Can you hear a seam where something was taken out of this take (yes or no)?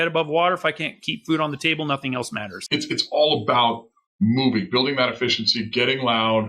yes